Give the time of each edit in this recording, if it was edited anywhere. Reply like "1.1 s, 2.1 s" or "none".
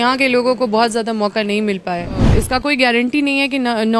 2.2 s